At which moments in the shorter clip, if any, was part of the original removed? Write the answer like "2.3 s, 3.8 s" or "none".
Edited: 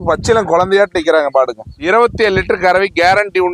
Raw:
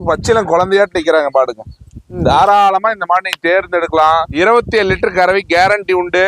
1.8 s